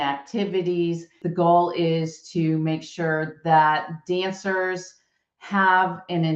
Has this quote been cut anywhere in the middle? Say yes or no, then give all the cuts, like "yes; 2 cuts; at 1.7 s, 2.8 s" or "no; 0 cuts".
yes; 1 cut; at 1.2 s